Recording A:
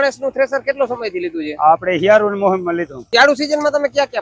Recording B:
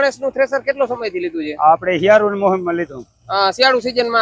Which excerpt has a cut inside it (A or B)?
A